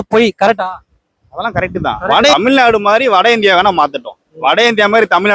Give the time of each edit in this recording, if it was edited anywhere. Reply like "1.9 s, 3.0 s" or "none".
2.1 s